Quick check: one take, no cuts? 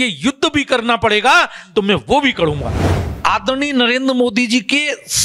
no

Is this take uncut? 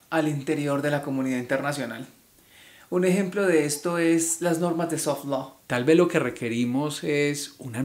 no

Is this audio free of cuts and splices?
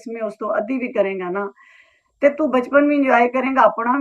yes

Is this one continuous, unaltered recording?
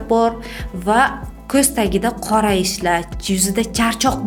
yes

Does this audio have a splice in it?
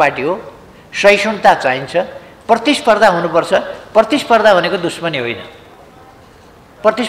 no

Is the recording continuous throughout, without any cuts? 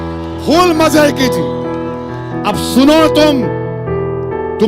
no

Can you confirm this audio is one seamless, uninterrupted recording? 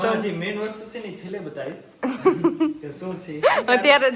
yes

